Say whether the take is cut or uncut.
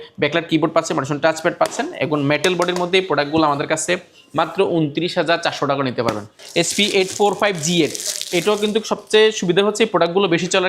cut